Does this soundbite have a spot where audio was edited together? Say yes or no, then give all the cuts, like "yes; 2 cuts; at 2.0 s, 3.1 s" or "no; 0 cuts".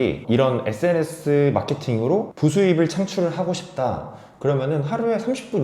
no; 0 cuts